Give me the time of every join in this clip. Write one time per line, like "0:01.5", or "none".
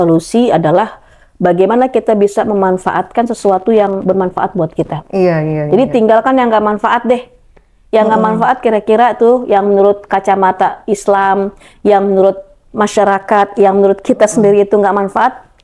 none